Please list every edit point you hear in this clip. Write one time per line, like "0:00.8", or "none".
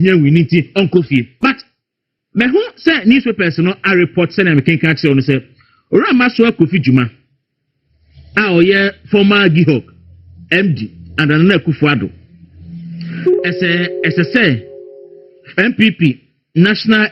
0:01.0